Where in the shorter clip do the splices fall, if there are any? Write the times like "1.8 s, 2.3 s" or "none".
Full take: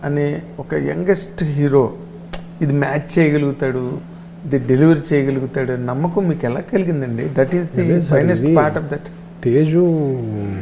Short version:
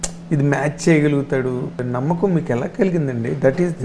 1.9 s

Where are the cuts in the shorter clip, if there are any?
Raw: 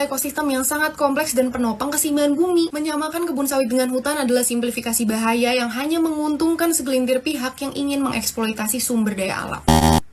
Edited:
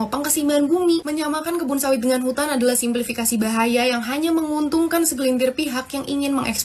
none

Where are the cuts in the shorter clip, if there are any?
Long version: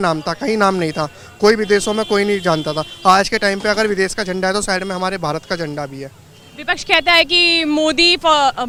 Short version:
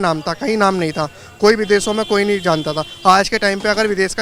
none

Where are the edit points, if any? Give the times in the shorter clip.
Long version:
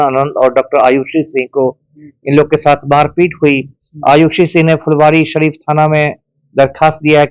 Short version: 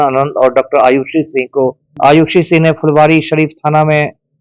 1.8 s

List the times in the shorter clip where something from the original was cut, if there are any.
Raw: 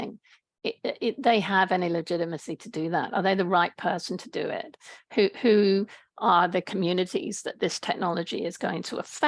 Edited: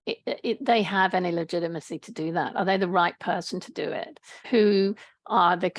4.4 s

